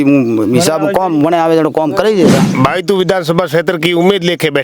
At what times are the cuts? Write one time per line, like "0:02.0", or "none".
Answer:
0:02.4